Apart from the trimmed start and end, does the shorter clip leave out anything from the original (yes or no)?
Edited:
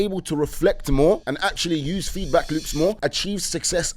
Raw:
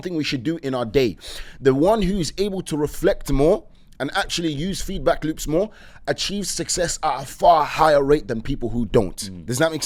yes